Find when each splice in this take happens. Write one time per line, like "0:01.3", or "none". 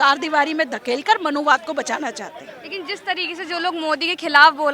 none